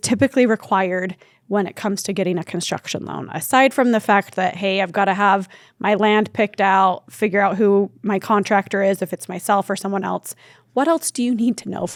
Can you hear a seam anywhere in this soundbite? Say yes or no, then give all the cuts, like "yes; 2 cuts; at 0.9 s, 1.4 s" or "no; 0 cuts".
no; 0 cuts